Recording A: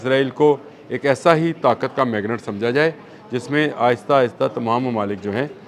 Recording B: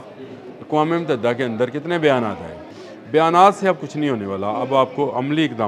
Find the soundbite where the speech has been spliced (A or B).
B